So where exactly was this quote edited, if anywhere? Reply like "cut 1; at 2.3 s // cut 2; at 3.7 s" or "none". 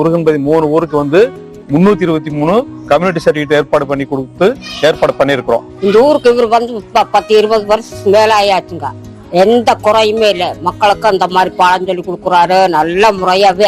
cut 1; at 5.7 s

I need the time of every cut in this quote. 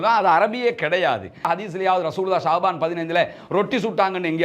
cut 1; at 1.5 s

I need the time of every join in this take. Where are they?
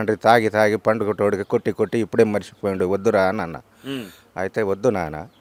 none

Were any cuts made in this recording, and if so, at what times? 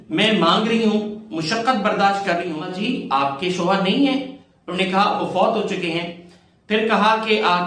cut 1; at 2.7 s

